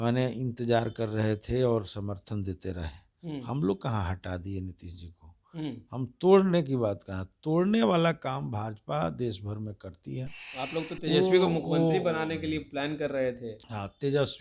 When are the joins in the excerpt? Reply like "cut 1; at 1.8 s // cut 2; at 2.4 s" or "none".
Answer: cut 1; at 10.4 s

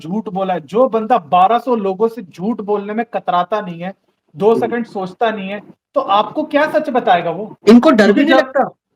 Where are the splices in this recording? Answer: cut 1; at 7.5 s

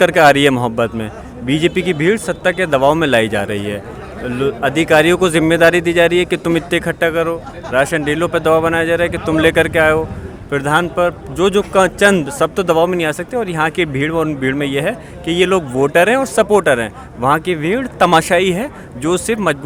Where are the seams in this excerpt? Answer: none

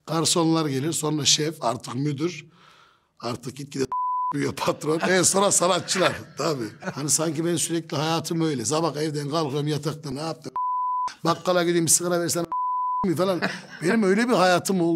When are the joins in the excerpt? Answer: cut 1; at 6.8 s // cut 2; at 10.1 s

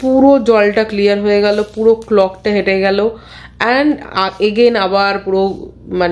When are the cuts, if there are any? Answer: none

